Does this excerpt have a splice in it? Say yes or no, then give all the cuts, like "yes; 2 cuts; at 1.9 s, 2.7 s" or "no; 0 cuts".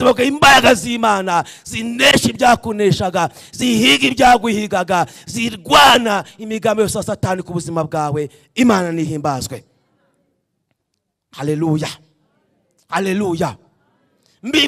no; 0 cuts